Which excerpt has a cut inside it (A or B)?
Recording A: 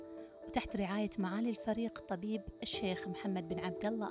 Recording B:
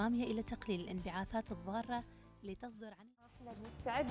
B